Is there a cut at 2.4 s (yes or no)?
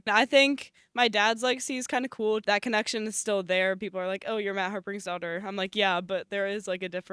yes